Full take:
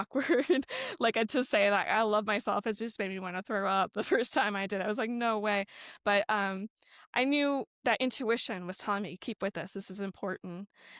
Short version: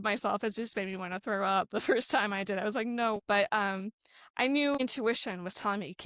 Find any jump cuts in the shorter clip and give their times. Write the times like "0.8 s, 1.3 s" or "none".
3.2 s, 4.8 s